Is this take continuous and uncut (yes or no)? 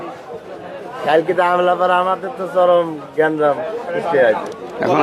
yes